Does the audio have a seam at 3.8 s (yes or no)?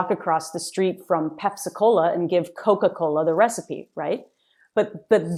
no